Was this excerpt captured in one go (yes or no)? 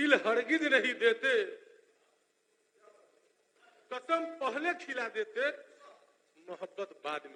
yes